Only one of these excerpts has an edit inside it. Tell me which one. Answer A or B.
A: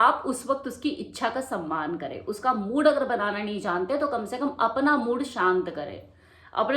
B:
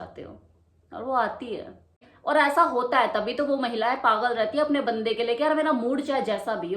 B